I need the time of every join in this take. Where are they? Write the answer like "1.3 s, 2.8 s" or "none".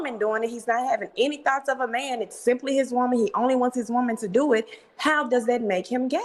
none